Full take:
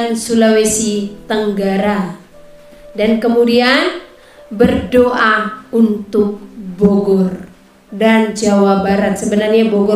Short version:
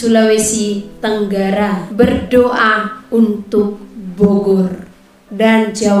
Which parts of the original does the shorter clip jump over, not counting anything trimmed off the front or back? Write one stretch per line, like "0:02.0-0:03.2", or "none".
0:02.1-0:04.4